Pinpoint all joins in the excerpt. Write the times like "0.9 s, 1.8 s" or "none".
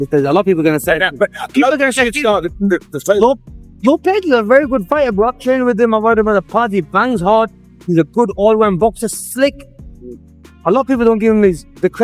none